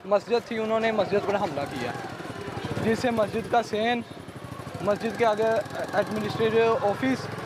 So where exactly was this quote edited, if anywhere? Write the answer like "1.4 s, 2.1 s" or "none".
none

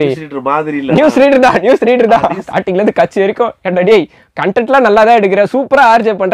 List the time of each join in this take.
2.4 s

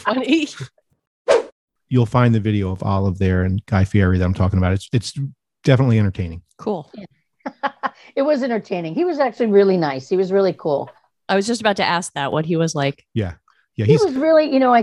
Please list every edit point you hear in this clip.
1.4 s

